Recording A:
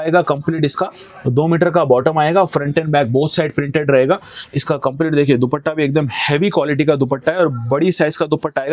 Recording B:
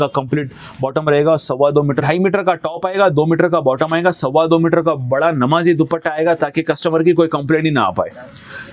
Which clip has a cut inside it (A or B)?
B